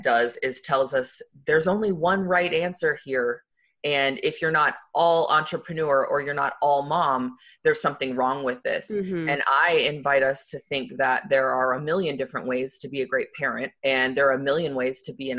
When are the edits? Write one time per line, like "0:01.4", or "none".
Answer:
0:04.9
0:13.7